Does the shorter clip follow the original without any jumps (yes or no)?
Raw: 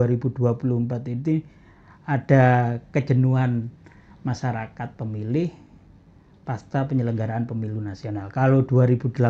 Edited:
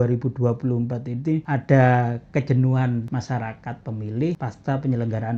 no